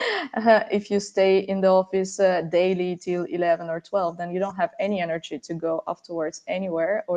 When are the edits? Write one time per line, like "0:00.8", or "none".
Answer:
none